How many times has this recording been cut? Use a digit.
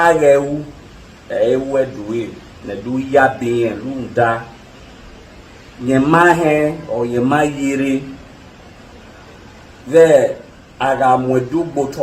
0